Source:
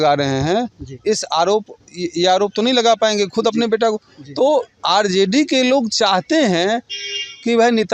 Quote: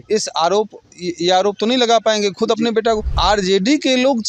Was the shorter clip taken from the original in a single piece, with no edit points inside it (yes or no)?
no